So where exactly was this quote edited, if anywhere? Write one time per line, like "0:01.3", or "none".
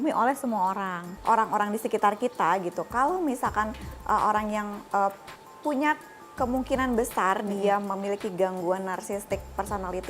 0:01.0